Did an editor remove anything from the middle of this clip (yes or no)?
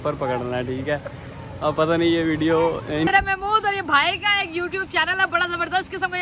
yes